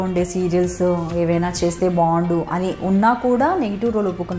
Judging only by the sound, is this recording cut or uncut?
uncut